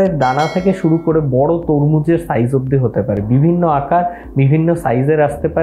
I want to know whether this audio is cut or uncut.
uncut